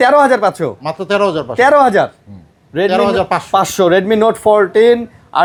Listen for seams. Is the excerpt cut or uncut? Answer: uncut